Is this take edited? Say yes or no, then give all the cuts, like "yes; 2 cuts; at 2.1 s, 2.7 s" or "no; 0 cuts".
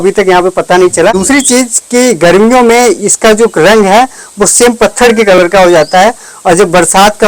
yes; 1 cut; at 1.2 s